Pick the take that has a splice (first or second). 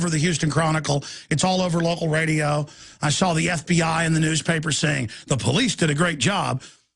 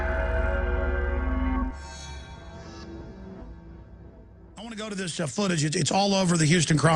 first